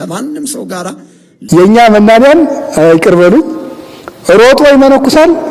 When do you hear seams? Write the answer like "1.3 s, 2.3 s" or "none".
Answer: 1.4 s